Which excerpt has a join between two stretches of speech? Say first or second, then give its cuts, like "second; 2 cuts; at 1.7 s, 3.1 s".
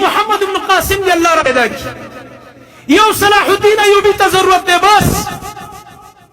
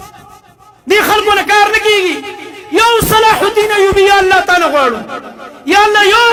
first; 1 cut; at 1.5 s